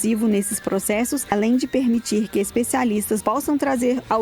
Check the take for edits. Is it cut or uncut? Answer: cut